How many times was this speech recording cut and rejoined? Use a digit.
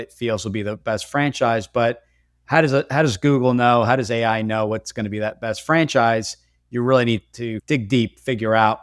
0